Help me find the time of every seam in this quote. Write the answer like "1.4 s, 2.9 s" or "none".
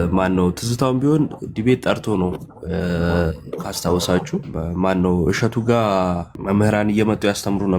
4.5 s, 6.3 s